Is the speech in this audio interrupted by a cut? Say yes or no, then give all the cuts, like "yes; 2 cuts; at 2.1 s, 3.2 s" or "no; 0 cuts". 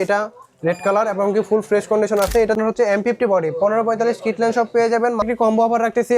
yes; 2 cuts; at 2.5 s, 5.2 s